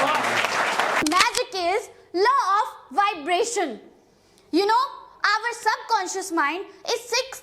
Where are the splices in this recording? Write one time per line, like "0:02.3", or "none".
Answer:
0:01.0